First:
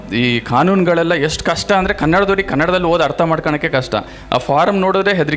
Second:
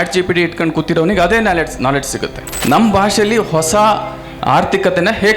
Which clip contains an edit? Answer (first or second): second